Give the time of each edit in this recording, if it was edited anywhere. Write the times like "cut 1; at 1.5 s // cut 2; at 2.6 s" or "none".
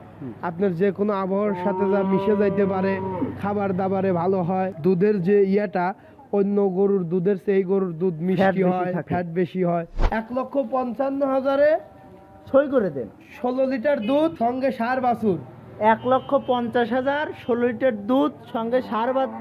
cut 1; at 4.7 s // cut 2; at 10.0 s // cut 3; at 14.3 s

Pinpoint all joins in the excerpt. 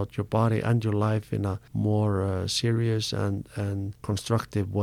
cut 1; at 1.6 s // cut 2; at 3.9 s

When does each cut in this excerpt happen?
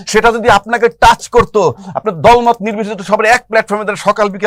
none

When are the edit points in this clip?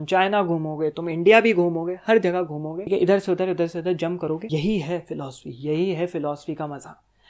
cut 1; at 2.9 s // cut 2; at 4.4 s

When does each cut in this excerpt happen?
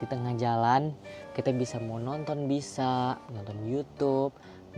none

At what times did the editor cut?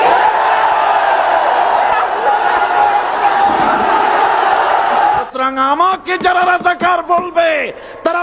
cut 1; at 5.1 s

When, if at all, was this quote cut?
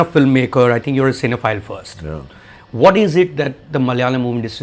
none

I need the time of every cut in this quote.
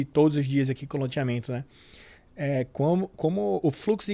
none

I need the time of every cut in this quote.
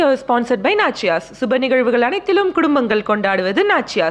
none

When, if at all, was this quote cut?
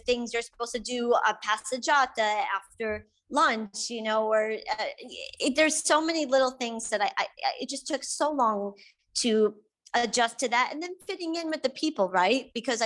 none

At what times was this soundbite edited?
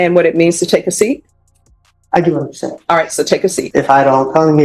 cut 1; at 3.6 s

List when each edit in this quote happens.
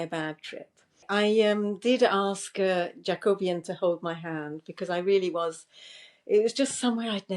cut 1; at 1.0 s

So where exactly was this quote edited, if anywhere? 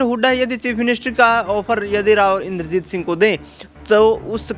none

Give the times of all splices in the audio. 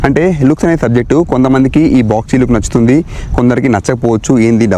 none

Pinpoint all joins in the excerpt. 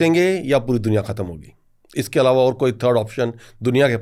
none

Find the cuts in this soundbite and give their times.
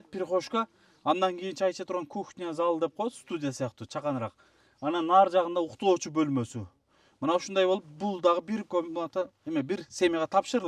none

